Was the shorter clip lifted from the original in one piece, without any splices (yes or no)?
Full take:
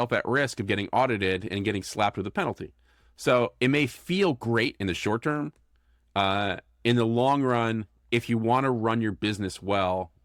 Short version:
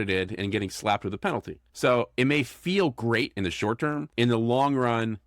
no